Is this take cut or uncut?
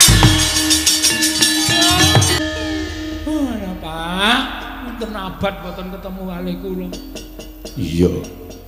cut